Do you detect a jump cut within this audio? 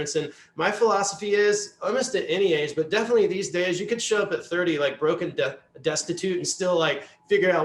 no; 0 cuts

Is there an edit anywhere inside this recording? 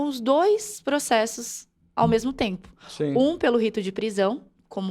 no; 0 cuts

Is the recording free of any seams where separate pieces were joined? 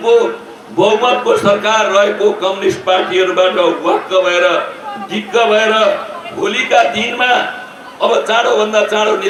yes; 0 cuts

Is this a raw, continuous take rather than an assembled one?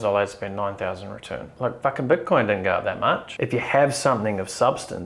no; 1 cut; at 3.3 s

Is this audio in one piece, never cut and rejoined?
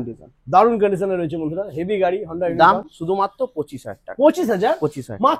yes; 0 cuts

